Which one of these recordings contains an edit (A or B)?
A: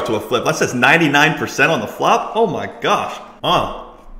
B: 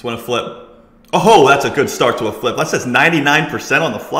A